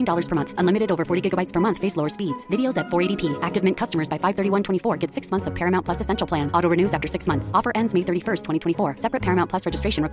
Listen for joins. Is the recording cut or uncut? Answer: uncut